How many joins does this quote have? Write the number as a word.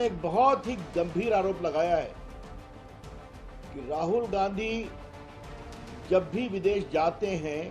two